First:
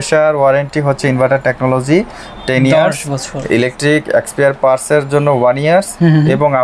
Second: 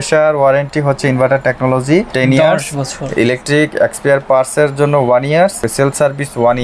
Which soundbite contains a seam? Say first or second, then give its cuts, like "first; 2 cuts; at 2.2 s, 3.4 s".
second; 2 cuts; at 2.1 s, 5.6 s